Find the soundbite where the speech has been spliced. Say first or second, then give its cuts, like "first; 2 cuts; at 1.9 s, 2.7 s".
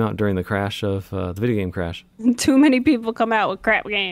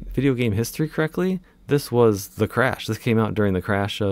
first; 1 cut; at 2.0 s